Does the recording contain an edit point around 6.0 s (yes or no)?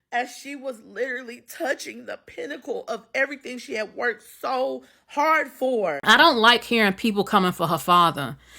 yes